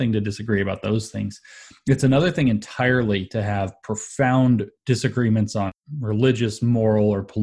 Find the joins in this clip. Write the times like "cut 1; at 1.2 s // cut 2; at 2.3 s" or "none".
cut 1; at 4.7 s // cut 2; at 5.7 s